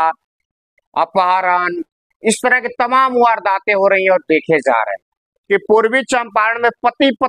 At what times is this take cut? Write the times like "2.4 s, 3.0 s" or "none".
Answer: 5.3 s